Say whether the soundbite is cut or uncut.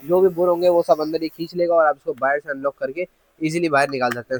uncut